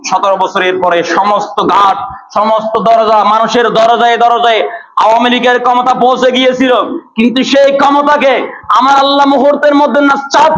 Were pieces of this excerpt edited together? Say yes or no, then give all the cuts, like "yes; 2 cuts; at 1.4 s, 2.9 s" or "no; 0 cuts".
no; 0 cuts